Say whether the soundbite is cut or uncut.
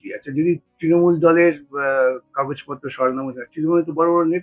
uncut